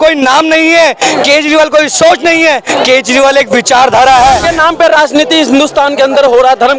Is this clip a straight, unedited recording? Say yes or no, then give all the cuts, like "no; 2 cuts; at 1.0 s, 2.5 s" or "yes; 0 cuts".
no; 1 cut; at 4.5 s